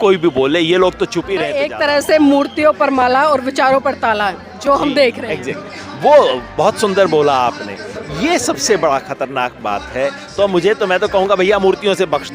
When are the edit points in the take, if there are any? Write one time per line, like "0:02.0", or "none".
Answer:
0:01.6